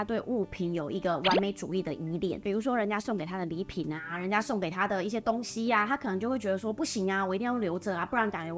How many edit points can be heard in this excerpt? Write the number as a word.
one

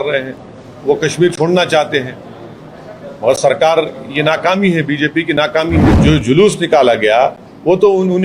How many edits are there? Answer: one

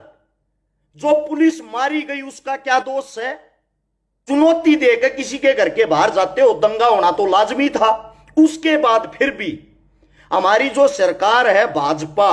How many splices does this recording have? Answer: one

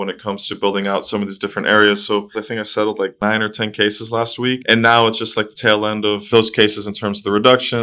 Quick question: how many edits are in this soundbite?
one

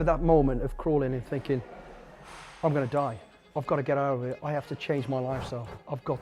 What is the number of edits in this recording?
zero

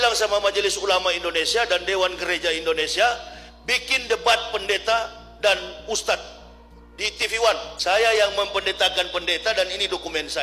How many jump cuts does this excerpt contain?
one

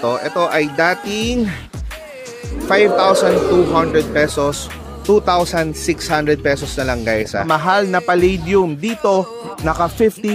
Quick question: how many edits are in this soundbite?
one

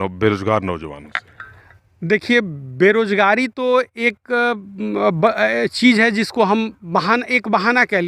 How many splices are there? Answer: zero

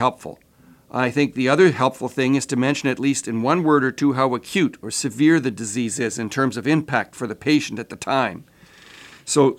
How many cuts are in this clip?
zero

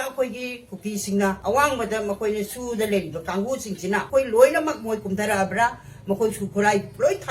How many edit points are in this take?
two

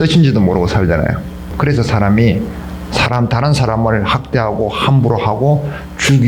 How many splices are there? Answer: one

